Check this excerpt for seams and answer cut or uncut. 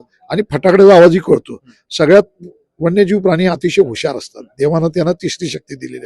uncut